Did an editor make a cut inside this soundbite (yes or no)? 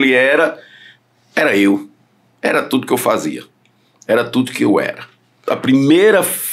yes